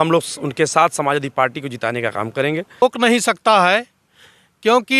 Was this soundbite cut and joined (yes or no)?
yes